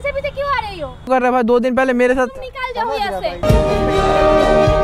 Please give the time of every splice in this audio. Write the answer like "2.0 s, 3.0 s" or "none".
1.1 s